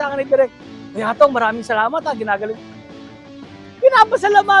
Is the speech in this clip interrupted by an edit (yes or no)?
no